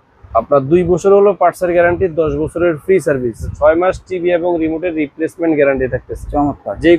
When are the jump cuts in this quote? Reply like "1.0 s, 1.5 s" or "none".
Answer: 3.5 s